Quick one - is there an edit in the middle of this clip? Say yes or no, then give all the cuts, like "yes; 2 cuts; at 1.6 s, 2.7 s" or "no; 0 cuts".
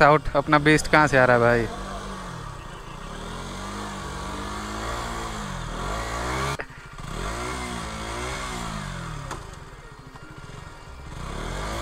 no; 0 cuts